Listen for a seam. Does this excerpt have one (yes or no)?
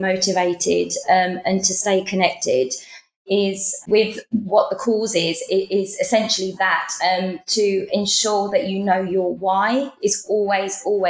no